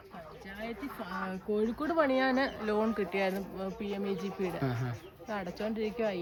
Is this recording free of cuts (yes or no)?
yes